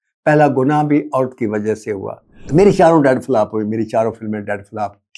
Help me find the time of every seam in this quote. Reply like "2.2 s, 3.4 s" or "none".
2.4 s